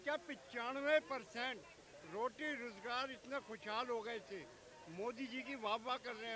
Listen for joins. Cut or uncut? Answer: uncut